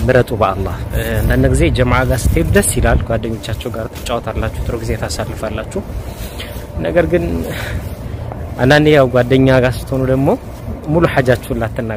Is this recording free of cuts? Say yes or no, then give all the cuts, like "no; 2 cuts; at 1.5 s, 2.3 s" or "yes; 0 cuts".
yes; 0 cuts